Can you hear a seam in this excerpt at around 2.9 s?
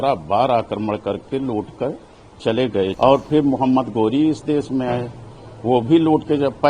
yes; 1 cut; at 2.9 s

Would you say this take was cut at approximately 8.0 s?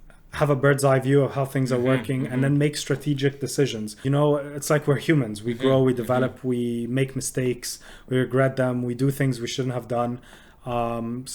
no; 1 cut; at 3.9 s

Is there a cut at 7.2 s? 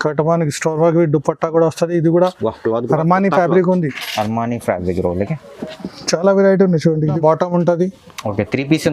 yes; 1 cut; at 7.2 s

